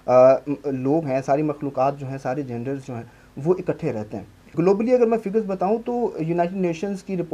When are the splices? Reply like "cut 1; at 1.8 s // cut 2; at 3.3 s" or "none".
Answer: cut 1; at 4.5 s